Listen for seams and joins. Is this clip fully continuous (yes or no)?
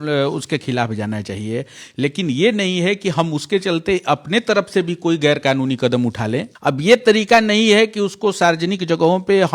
no